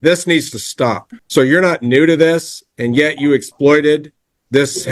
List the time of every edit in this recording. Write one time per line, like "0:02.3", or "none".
0:01.1